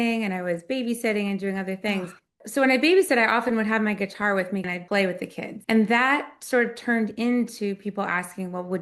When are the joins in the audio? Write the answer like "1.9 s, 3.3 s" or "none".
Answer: 4.7 s, 5.5 s